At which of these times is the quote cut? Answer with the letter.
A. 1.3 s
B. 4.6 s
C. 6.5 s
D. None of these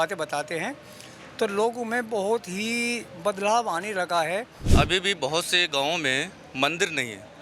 B